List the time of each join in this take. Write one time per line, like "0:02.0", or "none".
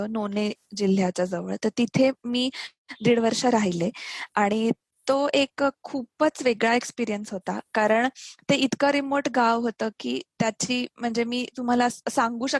none